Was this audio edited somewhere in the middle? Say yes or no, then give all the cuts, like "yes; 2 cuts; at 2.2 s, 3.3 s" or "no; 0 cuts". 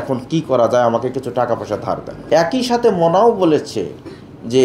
yes; 1 cut; at 2.1 s